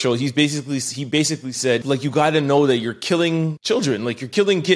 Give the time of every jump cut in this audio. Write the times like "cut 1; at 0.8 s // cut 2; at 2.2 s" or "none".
cut 1; at 1.8 s // cut 2; at 3.6 s